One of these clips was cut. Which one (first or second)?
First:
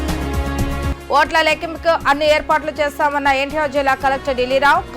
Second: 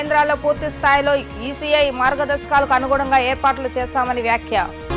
first